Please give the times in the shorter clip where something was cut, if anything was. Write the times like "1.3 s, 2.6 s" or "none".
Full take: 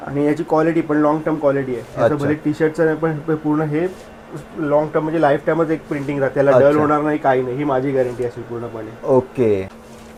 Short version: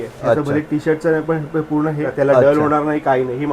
2.0 s